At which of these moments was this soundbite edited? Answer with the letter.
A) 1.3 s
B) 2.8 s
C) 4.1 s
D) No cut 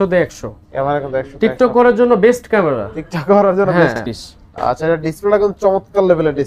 C